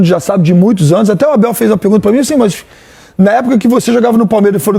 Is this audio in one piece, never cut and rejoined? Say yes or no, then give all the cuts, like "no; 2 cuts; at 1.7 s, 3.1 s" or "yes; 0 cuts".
yes; 0 cuts